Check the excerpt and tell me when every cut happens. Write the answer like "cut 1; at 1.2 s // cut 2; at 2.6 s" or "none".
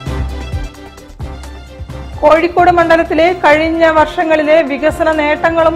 cut 1; at 1.4 s